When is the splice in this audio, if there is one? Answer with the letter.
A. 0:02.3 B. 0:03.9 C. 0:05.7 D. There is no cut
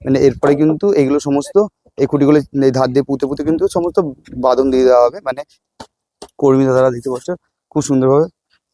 C